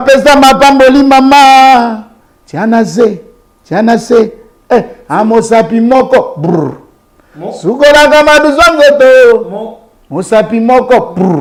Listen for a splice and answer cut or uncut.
uncut